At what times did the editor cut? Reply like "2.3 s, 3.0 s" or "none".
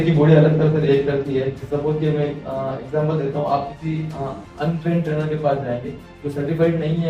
1.6 s